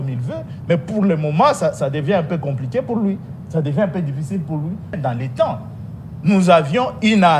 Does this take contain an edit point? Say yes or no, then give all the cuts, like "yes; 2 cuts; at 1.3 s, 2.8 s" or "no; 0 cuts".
yes; 1 cut; at 5.0 s